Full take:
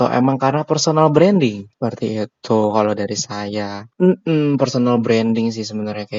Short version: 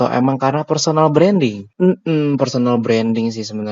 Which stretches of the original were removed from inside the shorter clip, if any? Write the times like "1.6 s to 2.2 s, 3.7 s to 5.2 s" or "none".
1.6 s to 3.8 s